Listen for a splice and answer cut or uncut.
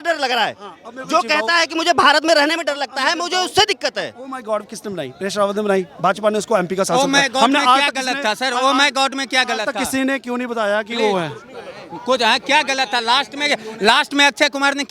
uncut